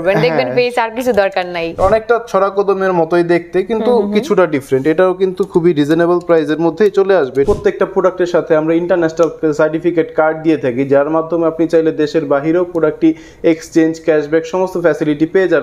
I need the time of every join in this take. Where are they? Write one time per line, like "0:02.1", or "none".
0:01.8
0:07.5